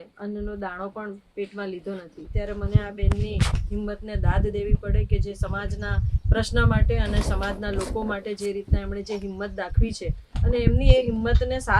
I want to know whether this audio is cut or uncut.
cut